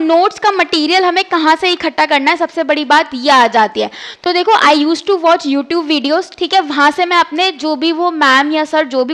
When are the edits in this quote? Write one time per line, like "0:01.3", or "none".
none